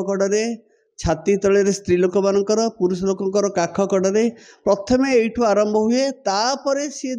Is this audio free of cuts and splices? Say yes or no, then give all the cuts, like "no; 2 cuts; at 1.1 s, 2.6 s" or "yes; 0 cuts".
yes; 0 cuts